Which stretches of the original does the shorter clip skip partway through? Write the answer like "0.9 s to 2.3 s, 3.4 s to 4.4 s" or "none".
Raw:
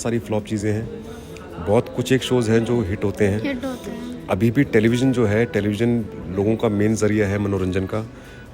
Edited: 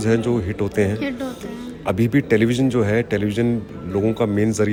none